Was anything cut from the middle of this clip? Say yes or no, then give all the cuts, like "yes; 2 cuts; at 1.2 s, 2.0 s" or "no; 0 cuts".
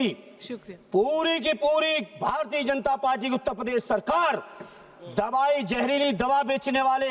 no; 0 cuts